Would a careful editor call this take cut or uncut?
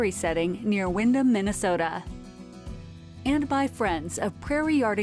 uncut